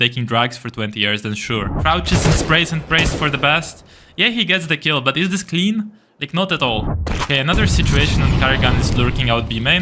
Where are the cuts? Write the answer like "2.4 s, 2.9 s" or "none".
1.7 s, 6.9 s